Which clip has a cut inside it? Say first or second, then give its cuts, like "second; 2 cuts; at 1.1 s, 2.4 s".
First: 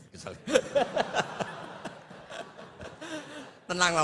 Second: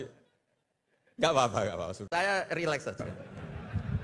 second; 2 cuts; at 2.0 s, 3.0 s